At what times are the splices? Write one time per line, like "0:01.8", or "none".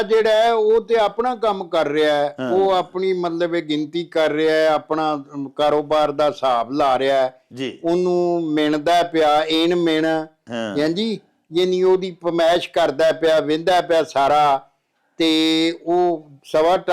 none